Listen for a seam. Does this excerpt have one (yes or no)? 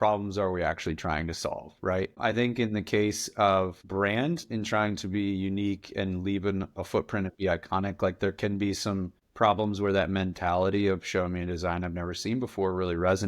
no